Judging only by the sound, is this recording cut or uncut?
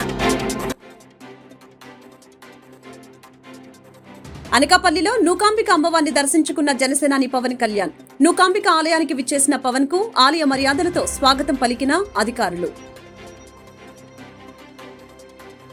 uncut